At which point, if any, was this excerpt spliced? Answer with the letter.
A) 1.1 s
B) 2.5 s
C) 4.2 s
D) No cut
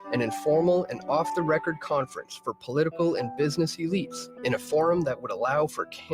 C